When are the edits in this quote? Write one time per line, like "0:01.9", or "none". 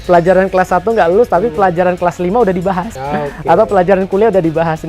0:03.0